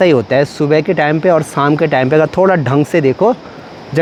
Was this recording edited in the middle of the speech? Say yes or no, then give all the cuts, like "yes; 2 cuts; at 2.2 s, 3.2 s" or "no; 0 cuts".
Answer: no; 0 cuts